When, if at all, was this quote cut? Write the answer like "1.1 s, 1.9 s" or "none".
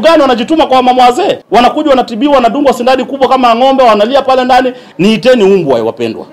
1.4 s, 4.8 s